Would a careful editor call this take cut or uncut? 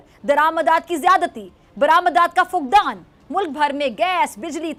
uncut